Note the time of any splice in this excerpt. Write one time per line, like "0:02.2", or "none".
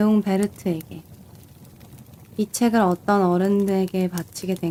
none